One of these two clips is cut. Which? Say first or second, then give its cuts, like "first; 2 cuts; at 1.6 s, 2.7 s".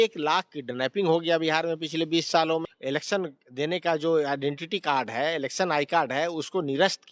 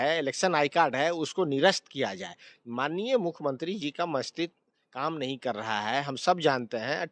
first; 1 cut; at 2.7 s